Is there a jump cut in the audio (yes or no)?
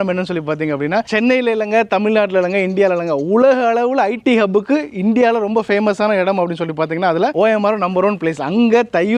no